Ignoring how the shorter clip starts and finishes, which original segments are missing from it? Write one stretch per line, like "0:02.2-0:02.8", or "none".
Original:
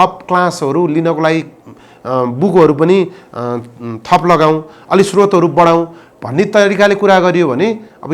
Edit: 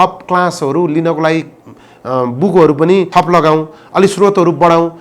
0:03.1-0:04.0